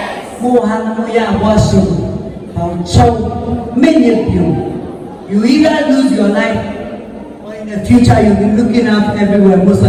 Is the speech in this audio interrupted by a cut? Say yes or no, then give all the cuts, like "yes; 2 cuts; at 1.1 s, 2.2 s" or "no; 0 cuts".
no; 0 cuts